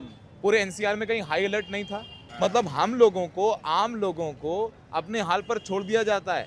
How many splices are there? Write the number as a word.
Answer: one